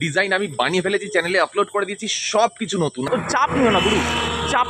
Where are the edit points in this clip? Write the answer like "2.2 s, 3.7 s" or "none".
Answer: 3.1 s